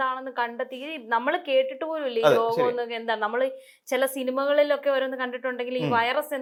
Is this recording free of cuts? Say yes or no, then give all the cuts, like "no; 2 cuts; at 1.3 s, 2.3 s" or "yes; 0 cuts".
yes; 0 cuts